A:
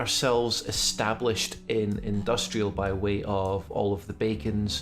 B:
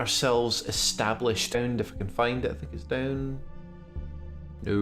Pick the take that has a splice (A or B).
A